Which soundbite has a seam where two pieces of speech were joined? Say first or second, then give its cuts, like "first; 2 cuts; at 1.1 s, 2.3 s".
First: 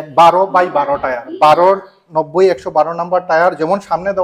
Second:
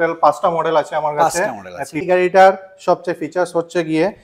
second; 1 cut; at 2.1 s